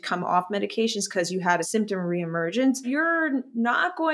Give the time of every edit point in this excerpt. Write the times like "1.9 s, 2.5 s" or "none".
1.7 s, 2.8 s